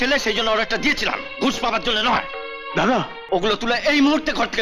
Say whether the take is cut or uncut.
cut